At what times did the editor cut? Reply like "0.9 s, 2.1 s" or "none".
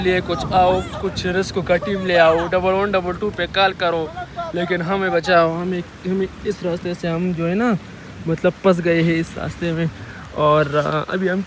none